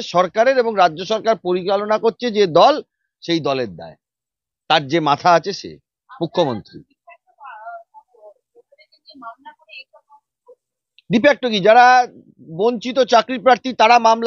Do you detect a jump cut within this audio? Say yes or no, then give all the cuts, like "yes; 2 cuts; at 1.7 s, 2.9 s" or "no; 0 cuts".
no; 0 cuts